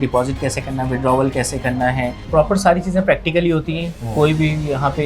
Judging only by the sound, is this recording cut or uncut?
cut